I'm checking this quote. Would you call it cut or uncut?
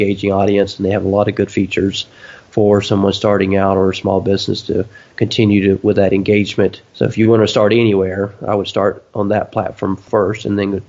cut